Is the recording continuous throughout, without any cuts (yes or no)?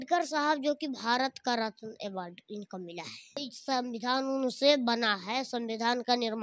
no